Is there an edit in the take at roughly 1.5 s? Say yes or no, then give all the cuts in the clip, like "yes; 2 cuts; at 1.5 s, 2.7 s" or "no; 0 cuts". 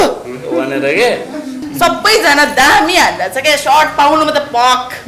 yes; 1 cut; at 1.5 s